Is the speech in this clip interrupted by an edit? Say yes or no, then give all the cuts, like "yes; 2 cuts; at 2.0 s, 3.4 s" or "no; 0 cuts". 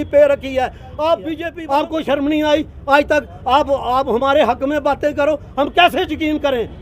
yes; 1 cut; at 1.5 s